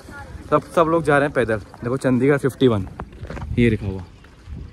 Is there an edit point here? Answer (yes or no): no